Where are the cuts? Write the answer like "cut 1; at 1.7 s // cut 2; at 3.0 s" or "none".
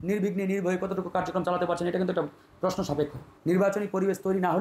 cut 1; at 3.3 s